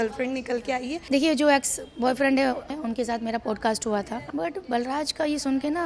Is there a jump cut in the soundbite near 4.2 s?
yes; 3 cuts; at 1.0 s, 2.7 s, 4.2 s

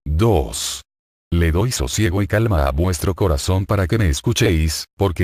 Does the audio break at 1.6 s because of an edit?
no; 0 cuts

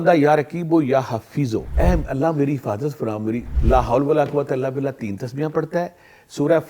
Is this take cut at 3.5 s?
yes; 2 cuts; at 1.7 s, 3.5 s

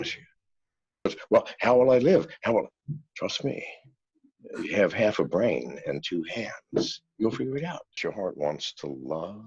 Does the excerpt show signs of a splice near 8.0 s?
yes; 2 cuts; at 1.1 s, 8.0 s

